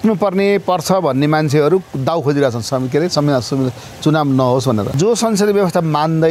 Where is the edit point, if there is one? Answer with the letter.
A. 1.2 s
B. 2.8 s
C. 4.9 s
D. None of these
C